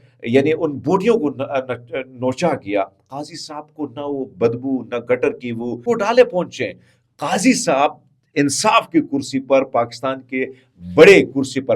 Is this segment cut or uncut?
cut